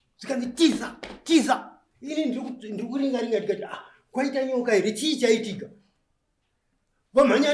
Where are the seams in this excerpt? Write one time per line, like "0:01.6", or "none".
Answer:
none